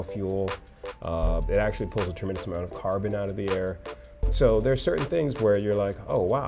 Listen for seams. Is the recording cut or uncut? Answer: uncut